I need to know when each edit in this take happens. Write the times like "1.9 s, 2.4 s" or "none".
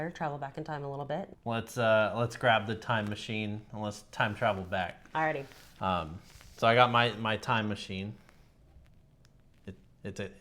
1.3 s